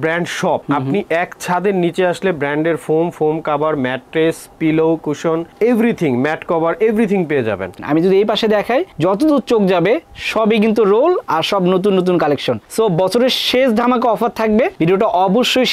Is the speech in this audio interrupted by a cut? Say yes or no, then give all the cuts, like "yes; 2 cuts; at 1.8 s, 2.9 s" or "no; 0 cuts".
yes; 1 cut; at 7.8 s